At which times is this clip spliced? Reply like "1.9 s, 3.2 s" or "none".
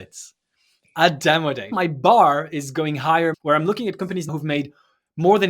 1.7 s, 3.4 s, 4.3 s